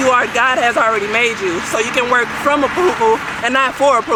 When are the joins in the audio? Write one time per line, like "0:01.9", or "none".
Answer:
none